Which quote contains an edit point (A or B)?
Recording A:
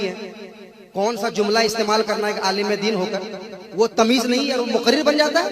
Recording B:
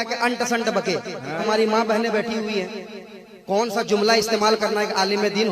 B